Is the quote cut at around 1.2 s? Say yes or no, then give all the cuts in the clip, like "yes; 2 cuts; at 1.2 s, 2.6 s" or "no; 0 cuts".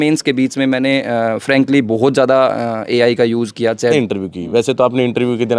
no; 1 cut; at 3.9 s